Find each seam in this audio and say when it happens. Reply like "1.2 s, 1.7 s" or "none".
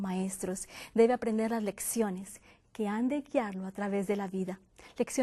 none

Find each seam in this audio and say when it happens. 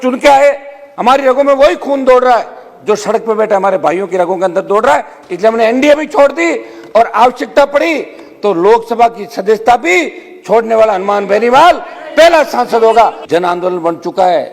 13.2 s

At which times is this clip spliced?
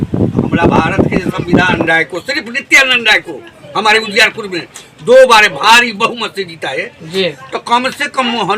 1.8 s

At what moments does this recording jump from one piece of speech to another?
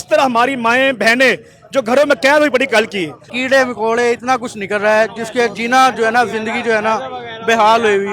3.3 s

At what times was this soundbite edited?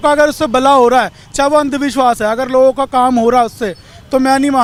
none

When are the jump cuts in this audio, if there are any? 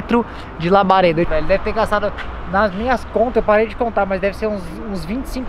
1.3 s

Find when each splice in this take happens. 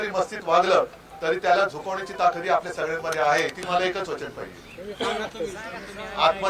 3.6 s

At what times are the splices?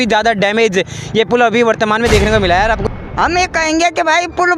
2.8 s

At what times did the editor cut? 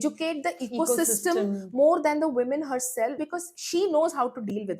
3.2 s

